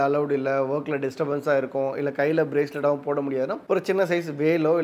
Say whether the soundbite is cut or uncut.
uncut